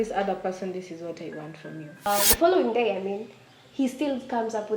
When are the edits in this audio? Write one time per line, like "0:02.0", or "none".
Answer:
0:02.1